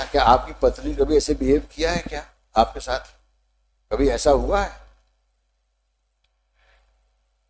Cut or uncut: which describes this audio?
uncut